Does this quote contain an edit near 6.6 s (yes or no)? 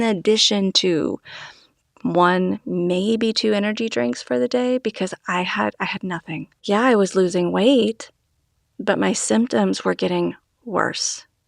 yes